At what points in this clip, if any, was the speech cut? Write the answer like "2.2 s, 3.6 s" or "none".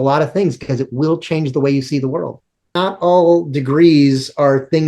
2.7 s